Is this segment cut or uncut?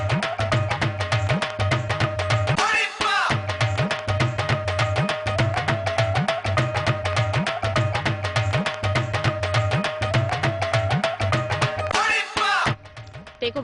cut